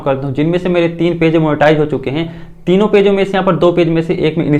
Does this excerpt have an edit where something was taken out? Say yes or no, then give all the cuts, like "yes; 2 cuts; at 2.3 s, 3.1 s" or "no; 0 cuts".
no; 0 cuts